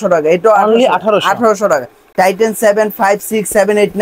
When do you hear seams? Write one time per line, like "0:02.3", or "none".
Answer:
0:02.0